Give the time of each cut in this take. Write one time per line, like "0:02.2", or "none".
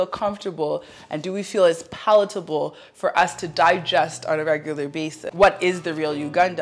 0:05.2